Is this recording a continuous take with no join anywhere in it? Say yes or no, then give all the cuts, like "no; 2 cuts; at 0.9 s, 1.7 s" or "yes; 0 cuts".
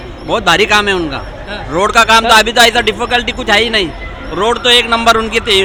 yes; 0 cuts